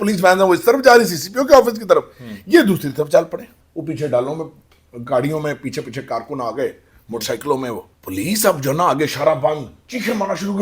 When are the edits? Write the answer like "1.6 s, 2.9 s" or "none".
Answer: 3.6 s, 7.9 s